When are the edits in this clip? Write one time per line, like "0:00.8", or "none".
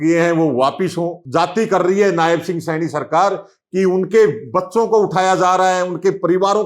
0:01.2